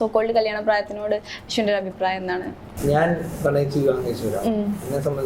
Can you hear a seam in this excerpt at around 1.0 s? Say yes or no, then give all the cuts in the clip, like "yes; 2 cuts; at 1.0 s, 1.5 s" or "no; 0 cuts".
no; 1 cut; at 2.6 s